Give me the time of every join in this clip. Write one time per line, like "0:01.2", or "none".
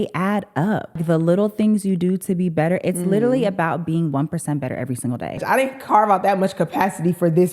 0:01.0
0:05.4